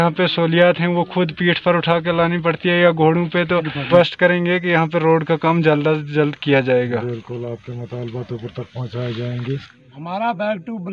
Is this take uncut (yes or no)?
no